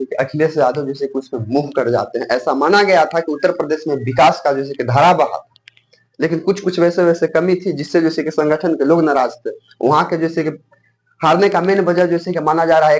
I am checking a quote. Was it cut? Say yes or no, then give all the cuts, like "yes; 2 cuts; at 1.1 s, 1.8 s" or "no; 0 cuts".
no; 0 cuts